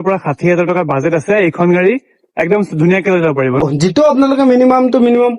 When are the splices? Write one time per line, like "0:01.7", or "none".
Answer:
0:03.6